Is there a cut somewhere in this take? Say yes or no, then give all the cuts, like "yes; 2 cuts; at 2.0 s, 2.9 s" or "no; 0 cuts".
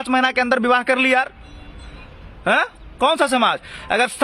no; 0 cuts